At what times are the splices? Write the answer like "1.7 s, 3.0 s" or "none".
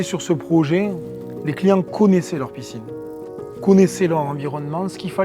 1.0 s